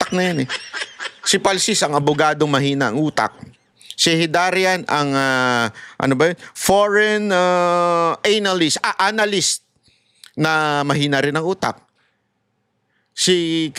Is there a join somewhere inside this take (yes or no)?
no